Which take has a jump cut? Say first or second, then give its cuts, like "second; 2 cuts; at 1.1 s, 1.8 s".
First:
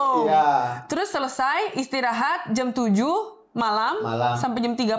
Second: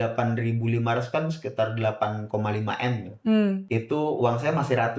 second; 1 cut; at 3.6 s